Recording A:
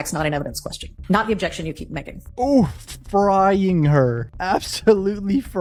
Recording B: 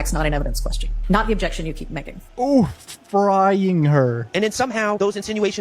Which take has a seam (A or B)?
B